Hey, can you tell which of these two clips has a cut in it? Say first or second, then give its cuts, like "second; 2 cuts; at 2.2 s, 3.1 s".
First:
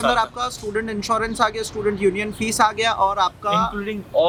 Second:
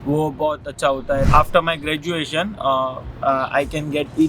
second; 1 cut; at 1.3 s